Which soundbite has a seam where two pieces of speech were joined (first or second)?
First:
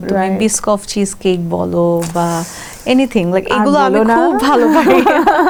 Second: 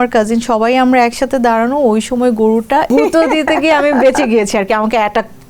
second